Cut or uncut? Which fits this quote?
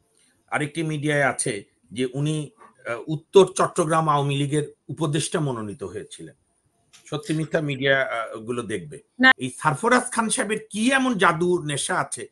cut